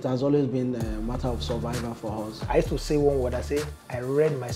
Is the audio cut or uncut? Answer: cut